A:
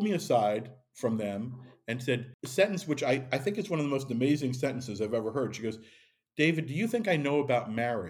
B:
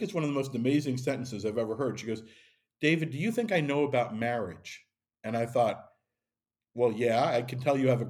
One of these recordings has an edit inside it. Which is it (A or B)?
A